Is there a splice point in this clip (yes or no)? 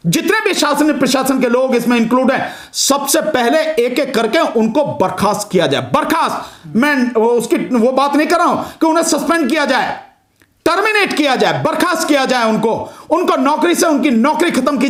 no